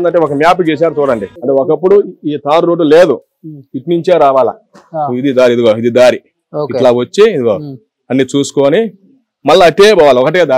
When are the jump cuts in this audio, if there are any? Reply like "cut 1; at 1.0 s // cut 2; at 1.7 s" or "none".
cut 1; at 1.4 s